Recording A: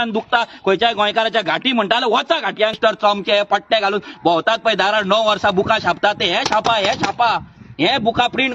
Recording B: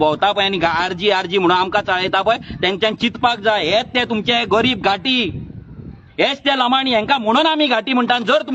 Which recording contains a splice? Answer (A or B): A